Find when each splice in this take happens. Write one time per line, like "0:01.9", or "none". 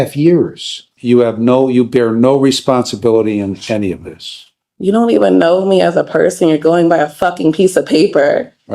0:00.9